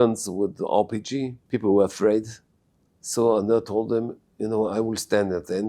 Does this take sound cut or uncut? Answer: cut